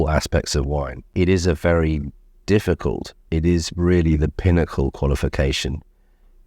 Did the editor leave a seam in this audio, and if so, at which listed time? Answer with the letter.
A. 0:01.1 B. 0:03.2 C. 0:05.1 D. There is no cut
A